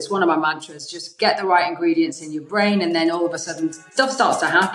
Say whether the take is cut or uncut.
cut